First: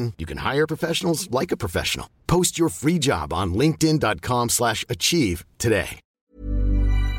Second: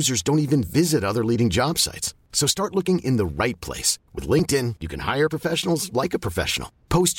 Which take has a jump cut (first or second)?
first